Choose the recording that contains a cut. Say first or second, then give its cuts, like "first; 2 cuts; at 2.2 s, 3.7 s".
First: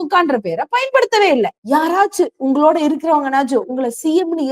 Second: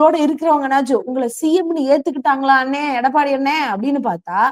first; 1 cut; at 1.6 s